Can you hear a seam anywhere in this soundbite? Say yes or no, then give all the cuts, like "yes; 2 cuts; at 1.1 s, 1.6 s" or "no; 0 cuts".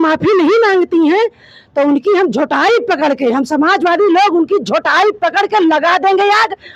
no; 0 cuts